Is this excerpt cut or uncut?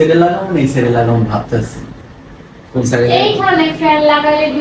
uncut